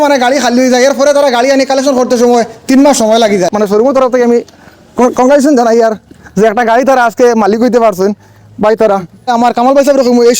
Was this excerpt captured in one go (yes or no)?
no